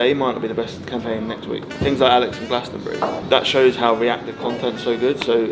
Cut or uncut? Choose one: uncut